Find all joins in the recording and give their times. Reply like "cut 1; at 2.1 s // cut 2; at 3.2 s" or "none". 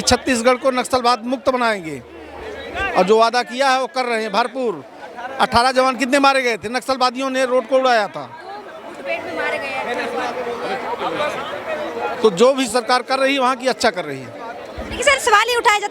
none

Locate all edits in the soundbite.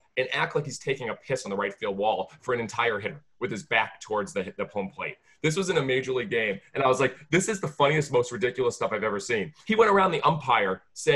cut 1; at 9.5 s

